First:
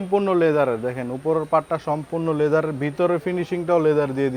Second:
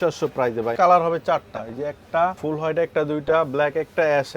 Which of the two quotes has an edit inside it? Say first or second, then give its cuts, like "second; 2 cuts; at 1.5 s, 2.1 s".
second; 2 cuts; at 0.7 s, 2.4 s